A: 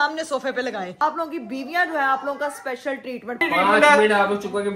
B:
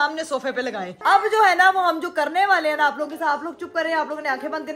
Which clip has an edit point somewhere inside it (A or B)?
A